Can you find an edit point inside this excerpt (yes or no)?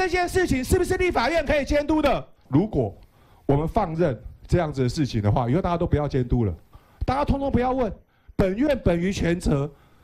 yes